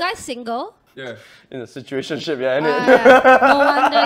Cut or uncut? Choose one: cut